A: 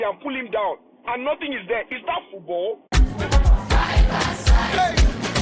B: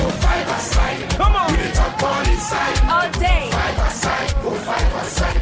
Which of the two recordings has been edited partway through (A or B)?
A